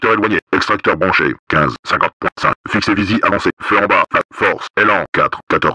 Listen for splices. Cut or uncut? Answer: cut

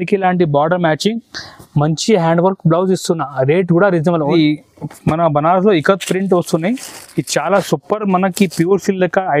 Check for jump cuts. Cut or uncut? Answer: cut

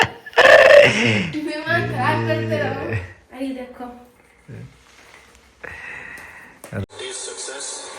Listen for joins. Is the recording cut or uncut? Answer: cut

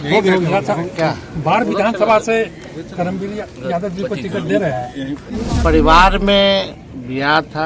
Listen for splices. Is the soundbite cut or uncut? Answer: cut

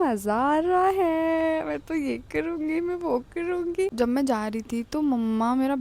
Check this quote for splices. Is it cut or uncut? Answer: cut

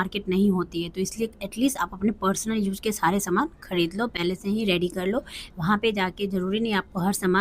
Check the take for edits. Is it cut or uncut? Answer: uncut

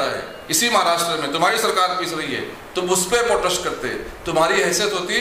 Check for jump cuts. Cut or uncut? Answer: uncut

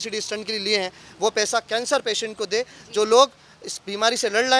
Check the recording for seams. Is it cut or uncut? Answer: uncut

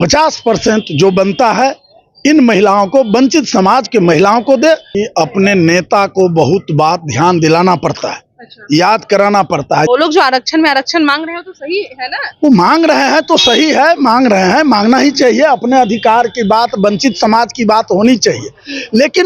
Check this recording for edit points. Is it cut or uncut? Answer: cut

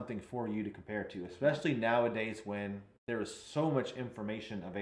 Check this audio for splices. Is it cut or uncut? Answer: uncut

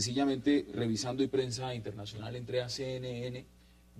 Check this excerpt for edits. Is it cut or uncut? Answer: uncut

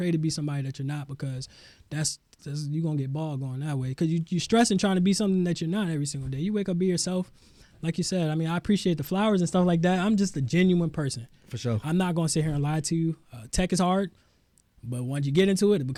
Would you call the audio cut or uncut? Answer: uncut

